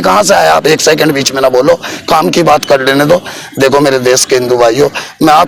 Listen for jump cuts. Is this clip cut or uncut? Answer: uncut